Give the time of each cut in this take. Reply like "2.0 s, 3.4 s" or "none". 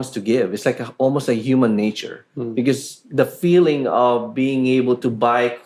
none